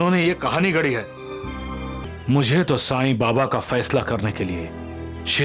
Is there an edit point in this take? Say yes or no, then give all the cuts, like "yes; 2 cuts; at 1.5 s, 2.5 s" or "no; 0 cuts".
yes; 1 cut; at 2.0 s